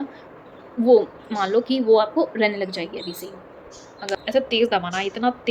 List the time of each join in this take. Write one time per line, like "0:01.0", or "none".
0:04.1